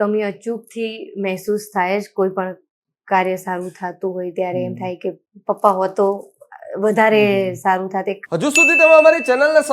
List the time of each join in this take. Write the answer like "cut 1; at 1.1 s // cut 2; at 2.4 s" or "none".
cut 1; at 8.2 s